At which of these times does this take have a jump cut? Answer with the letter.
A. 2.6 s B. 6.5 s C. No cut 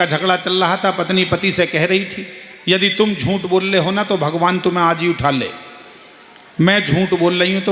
C